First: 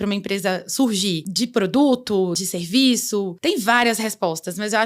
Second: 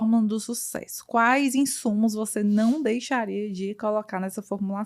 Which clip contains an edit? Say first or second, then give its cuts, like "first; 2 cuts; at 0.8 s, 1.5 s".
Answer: first; 3 cuts; at 1.3 s, 2.4 s, 3.3 s